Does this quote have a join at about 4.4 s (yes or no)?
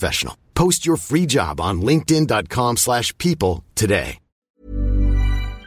yes